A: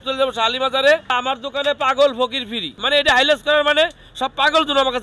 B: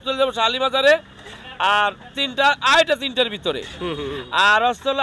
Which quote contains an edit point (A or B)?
A